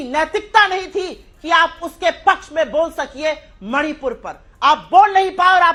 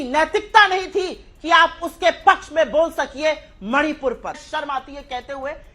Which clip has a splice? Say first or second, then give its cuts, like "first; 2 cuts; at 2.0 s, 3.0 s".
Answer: second; 1 cut; at 4.5 s